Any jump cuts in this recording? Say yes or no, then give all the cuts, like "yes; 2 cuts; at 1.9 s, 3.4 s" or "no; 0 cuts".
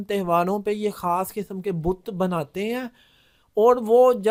no; 0 cuts